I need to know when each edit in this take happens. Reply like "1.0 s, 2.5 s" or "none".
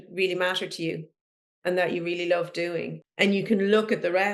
3.0 s

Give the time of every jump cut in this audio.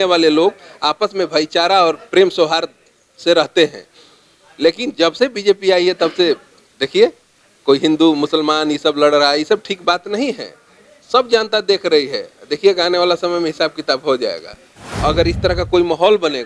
14.9 s

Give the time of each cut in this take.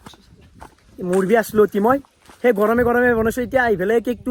none

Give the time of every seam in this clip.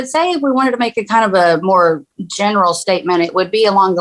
none

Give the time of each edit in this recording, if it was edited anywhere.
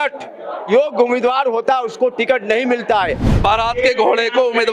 3.3 s

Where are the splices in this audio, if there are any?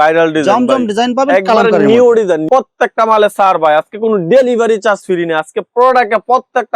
2.4 s

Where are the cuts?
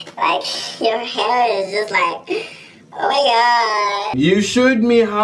4.1 s

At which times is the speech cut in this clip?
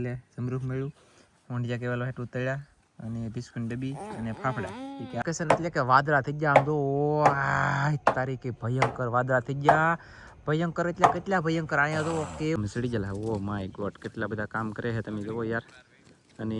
5.2 s, 12.6 s

